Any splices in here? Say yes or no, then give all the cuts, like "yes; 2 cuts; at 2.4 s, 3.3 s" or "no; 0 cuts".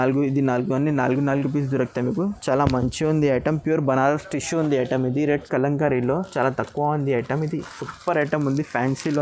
yes; 1 cut; at 5.4 s